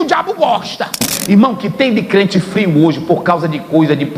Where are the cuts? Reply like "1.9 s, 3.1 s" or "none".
1.1 s